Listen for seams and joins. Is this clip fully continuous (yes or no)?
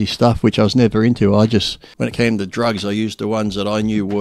no